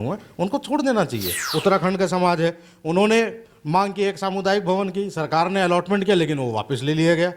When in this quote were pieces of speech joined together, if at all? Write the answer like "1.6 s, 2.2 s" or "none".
1.4 s